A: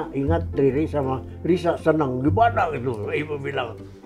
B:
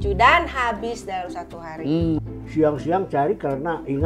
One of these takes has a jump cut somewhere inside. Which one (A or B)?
B